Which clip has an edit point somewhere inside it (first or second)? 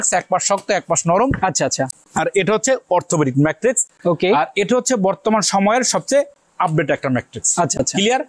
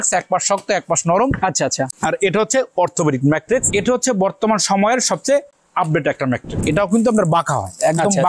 second